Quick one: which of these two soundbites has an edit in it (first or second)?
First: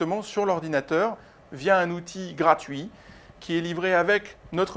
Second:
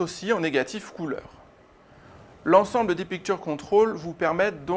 second